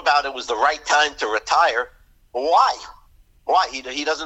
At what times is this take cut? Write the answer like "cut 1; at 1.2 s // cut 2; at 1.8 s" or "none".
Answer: none